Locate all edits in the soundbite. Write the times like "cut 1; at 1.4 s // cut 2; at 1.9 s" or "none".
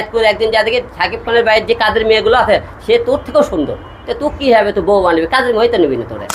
none